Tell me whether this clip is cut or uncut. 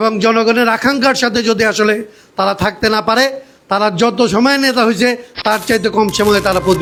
uncut